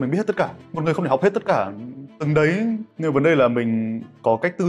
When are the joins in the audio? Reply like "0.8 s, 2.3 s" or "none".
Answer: none